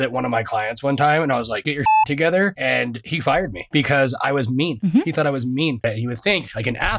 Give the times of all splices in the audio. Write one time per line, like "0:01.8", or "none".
0:01.6
0:03.0
0:04.7
0:05.8